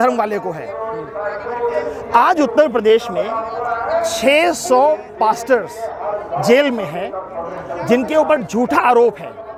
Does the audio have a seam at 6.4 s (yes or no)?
no